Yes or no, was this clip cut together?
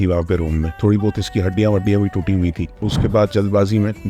yes